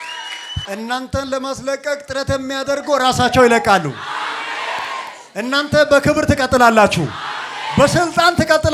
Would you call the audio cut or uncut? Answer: uncut